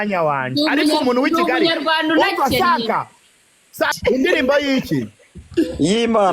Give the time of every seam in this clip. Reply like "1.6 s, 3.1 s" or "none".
3.9 s